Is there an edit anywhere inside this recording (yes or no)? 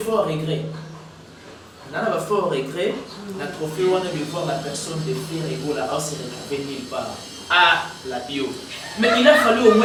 no